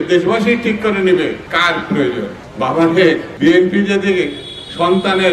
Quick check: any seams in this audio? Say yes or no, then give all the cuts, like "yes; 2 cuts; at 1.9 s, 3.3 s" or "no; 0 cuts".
yes; 3 cuts; at 1.4 s, 2.4 s, 3.3 s